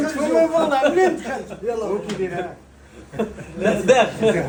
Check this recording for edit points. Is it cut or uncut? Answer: uncut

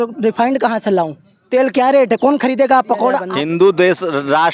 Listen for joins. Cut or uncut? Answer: cut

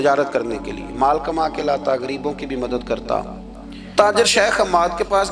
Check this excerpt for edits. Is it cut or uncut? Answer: cut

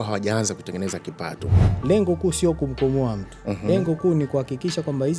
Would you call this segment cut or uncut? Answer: cut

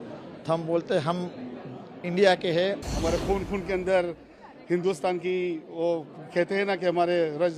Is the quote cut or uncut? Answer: cut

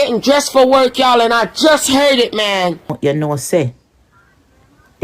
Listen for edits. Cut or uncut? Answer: cut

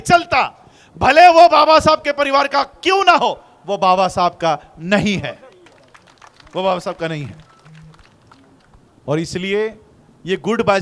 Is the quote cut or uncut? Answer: uncut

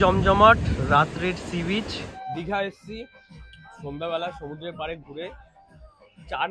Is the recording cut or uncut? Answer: uncut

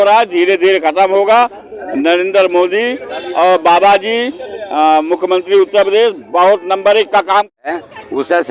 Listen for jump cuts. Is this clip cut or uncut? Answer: cut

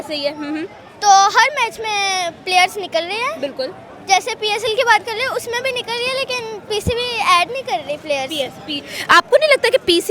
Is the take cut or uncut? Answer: uncut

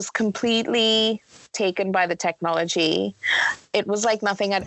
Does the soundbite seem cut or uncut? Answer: uncut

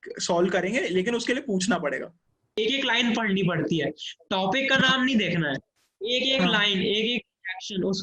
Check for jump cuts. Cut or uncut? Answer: cut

